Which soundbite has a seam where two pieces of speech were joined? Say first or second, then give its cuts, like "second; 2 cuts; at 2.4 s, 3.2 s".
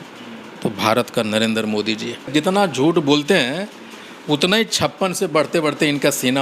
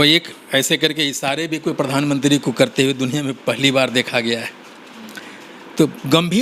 first; 1 cut; at 2.3 s